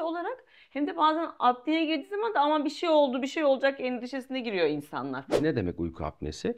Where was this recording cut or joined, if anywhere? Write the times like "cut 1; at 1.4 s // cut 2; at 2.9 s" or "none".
cut 1; at 5.3 s

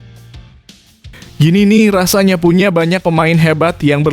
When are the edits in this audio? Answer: cut 1; at 1.3 s

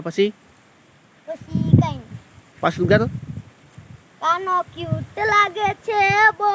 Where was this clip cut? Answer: none

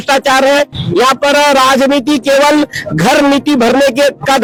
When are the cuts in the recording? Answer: none

